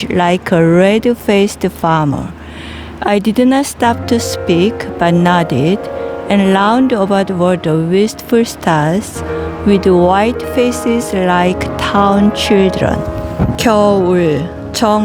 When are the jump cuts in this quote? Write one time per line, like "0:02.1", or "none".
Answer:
0:13.5